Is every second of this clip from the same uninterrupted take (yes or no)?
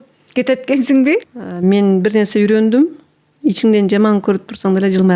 no